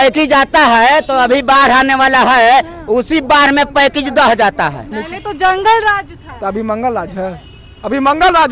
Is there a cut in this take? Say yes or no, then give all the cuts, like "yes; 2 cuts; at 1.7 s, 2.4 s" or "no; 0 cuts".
yes; 1 cut; at 5.0 s